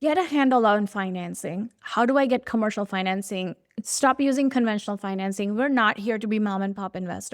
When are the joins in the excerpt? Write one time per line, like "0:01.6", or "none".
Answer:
none